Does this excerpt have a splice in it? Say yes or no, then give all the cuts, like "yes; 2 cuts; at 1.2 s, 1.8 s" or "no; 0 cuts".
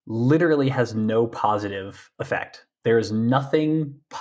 no; 0 cuts